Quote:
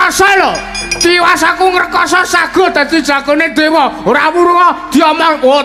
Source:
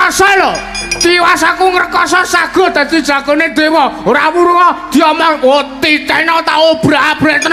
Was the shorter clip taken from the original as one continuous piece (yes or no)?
yes